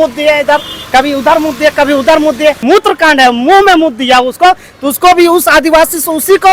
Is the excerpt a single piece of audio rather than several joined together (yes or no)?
no